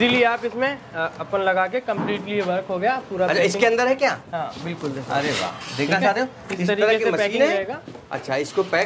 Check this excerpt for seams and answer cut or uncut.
uncut